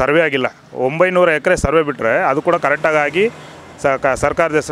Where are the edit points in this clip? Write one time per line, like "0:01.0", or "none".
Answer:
none

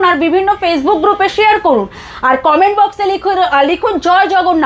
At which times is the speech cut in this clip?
none

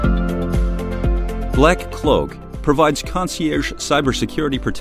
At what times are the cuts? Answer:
0:01.6

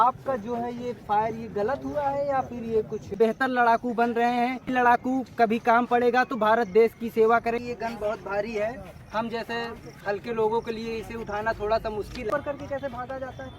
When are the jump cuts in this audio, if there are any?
0:03.1
0:04.7
0:07.6
0:12.3

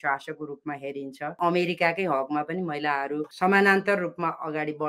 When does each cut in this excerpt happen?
0:01.4

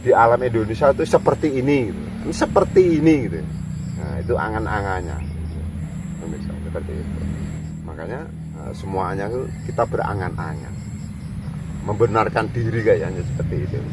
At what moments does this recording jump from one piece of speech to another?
0:07.6
0:08.7

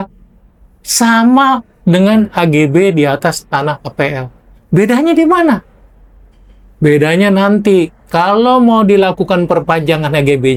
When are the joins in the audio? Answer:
none

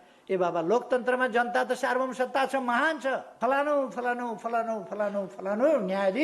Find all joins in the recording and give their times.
0:03.3

